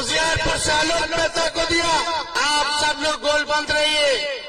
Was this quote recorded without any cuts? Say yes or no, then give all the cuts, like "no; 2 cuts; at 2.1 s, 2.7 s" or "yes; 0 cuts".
no; 1 cut; at 2.3 s